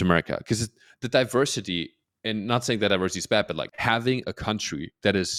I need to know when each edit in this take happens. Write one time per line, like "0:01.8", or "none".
0:03.7